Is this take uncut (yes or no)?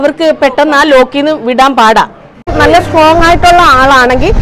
no